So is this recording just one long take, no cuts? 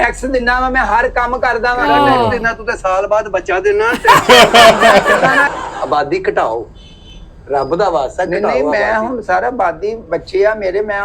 no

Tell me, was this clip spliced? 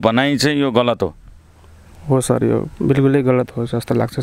no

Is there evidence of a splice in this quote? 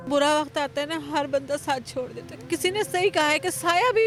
no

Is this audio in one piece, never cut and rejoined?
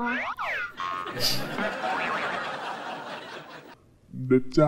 yes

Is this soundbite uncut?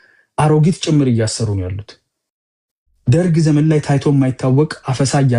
yes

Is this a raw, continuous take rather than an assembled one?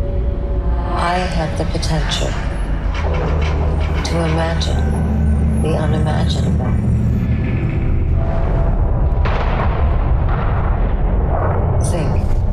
yes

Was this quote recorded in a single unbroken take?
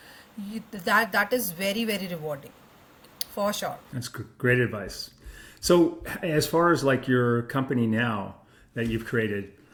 yes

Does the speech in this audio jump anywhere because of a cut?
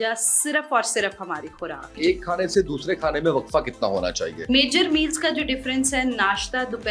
yes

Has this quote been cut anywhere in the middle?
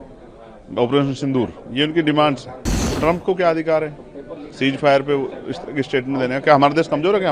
yes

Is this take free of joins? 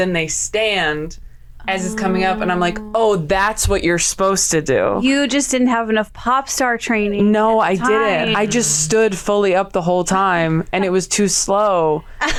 yes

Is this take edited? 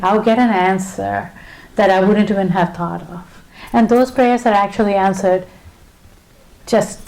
yes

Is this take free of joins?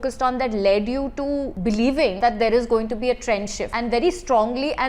no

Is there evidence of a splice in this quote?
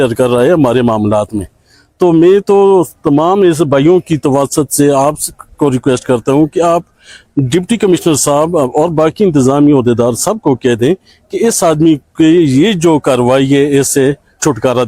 no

